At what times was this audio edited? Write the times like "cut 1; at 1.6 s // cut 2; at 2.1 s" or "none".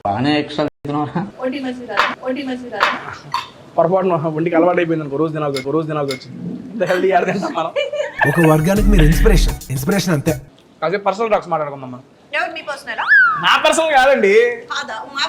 cut 1; at 10.4 s // cut 2; at 13.2 s